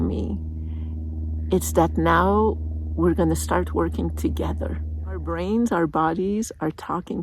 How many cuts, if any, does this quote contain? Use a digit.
1